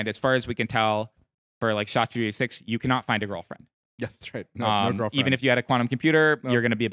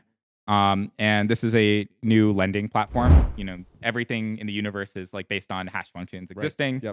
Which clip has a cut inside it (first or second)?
second